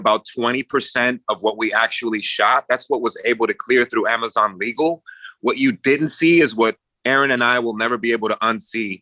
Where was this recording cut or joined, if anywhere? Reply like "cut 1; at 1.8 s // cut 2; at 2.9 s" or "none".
none